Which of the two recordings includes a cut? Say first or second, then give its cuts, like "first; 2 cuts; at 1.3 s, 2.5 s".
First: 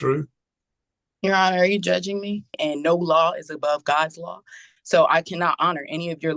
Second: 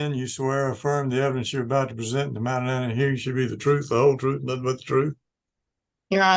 first; 1 cut; at 2.6 s